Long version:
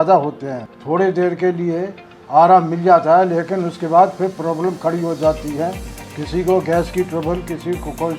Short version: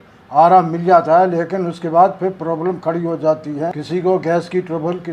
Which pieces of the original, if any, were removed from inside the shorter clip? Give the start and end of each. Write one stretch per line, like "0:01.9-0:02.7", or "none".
0:05.8-0:06.2